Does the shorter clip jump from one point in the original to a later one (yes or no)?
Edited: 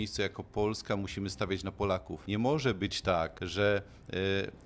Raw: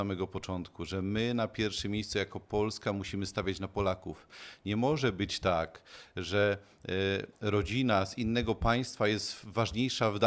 yes